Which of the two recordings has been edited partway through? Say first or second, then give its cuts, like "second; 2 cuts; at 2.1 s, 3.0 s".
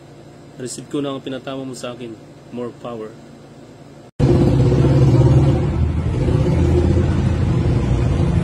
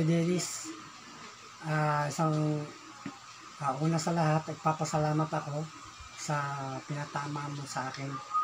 first; 1 cut; at 4.1 s